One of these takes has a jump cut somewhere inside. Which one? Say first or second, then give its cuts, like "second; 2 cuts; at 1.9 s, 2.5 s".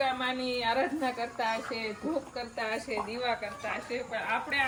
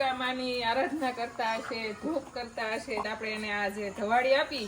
second; 1 cut; at 3.0 s